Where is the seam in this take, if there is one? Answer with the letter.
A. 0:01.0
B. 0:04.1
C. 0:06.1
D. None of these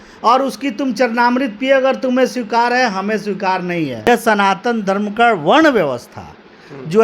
B